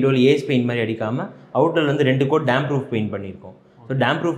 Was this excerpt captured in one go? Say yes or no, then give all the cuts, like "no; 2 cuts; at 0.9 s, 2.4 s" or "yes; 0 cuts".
yes; 0 cuts